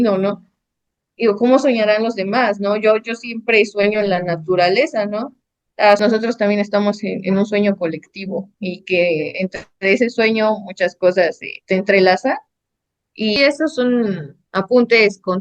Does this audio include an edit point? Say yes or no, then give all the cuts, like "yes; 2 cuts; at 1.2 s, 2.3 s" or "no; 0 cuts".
yes; 2 cuts; at 6.0 s, 13.3 s